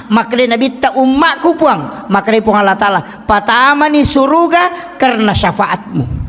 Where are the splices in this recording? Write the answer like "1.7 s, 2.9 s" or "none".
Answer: none